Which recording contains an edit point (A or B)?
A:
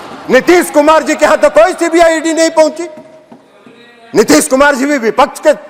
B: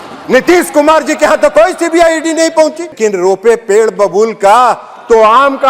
B